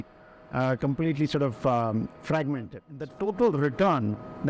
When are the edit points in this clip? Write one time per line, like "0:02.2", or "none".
0:02.9